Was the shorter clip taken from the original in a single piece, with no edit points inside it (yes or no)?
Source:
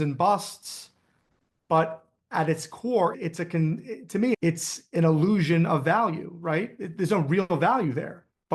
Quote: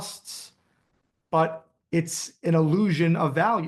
no